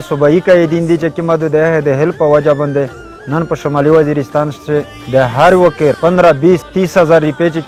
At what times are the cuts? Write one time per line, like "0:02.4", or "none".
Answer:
none